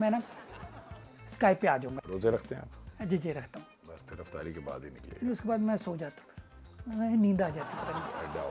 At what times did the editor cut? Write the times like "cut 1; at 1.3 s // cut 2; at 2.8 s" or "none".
cut 1; at 1.9 s // cut 2; at 3.8 s